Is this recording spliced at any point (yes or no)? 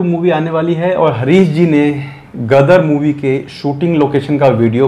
no